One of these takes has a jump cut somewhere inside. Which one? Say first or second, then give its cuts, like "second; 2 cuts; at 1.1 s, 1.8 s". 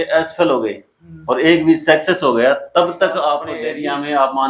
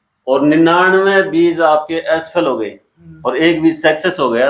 first; 1 cut; at 3.5 s